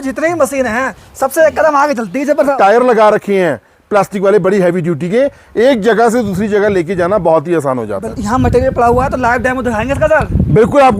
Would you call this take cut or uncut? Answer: cut